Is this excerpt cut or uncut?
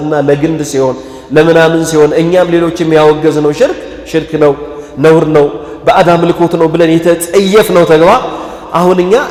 uncut